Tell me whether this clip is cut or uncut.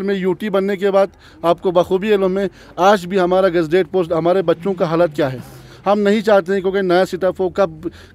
uncut